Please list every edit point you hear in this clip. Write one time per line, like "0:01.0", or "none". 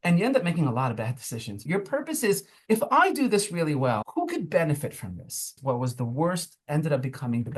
0:01.6
0:02.5
0:04.0
0:05.5